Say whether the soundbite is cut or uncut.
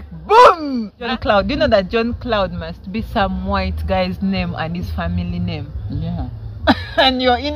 cut